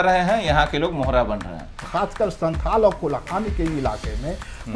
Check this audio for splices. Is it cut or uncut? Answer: cut